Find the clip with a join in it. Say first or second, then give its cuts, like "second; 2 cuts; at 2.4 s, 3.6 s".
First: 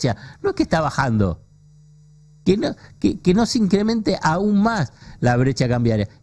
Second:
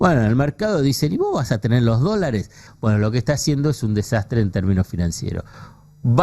second; 1 cut; at 2.7 s